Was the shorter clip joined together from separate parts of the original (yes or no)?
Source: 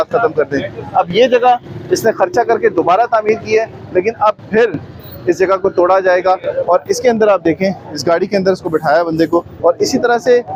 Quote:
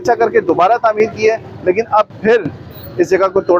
no